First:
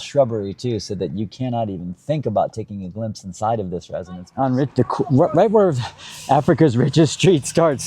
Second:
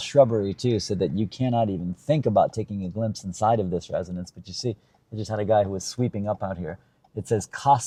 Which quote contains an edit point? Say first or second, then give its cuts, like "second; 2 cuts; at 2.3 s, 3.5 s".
first; 1 cut; at 4.4 s